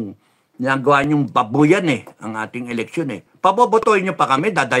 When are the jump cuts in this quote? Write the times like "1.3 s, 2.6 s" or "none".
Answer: none